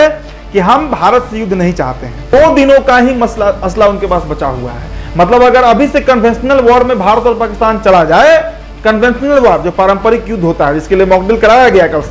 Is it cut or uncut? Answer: cut